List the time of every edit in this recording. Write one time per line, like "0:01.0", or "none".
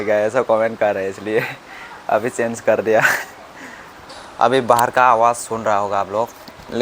0:04.0